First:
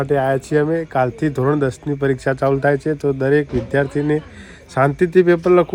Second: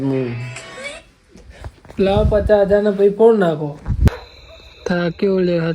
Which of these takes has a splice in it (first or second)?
second